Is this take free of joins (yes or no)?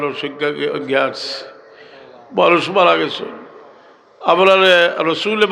yes